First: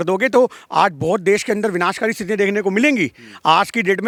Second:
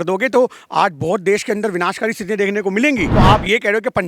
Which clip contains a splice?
second; 1 cut; at 3.1 s

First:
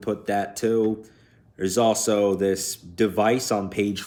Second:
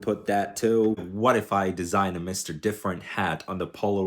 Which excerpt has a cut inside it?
second; 1 cut; at 1.1 s

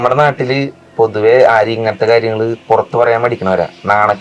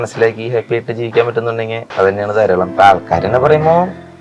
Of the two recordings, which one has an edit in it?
second; 2 cuts; at 1.8 s, 2.7 s

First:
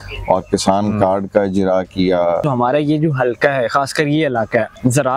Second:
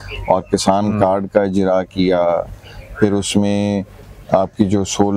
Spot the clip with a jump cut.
first; 1 cut; at 2.4 s

